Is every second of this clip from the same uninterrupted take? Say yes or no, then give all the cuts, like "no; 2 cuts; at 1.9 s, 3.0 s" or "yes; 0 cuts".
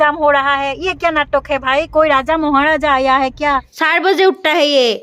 no; 1 cut; at 3.7 s